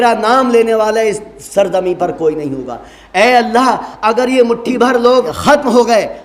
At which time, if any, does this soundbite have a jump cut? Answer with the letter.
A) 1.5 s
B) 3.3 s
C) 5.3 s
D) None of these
C